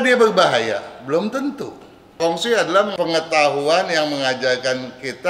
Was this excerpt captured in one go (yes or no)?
no